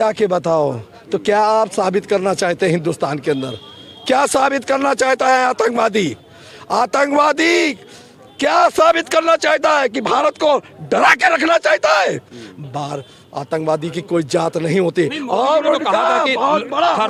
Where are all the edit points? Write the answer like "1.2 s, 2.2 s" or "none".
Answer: none